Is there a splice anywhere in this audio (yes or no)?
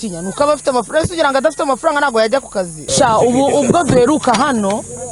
yes